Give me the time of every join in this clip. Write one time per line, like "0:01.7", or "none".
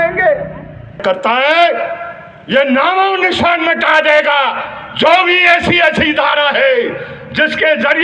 0:01.0